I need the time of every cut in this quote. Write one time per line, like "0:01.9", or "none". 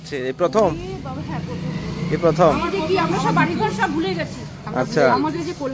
none